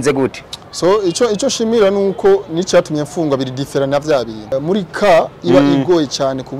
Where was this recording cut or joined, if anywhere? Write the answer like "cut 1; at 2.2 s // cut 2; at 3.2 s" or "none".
cut 1; at 4.5 s

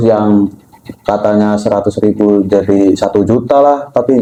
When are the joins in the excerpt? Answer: none

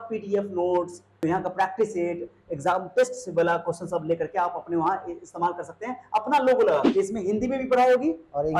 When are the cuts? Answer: cut 1; at 1.2 s // cut 2; at 6.9 s

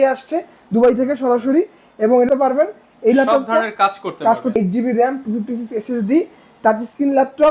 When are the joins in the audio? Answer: cut 1; at 2.3 s // cut 2; at 4.6 s

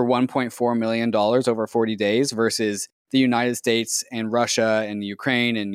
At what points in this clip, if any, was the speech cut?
none

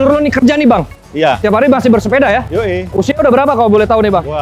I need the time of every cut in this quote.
cut 1; at 1.4 s // cut 2; at 2.9 s

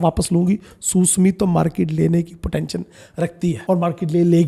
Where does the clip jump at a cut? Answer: none

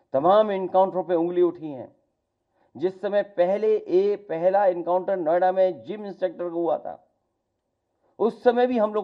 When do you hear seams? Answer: none

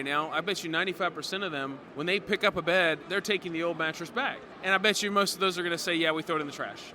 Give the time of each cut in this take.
cut 1; at 1.8 s // cut 2; at 3.0 s // cut 3; at 4.4 s

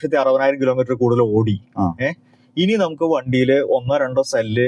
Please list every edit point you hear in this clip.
none

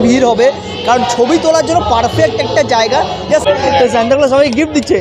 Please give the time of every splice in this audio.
cut 1; at 3.4 s

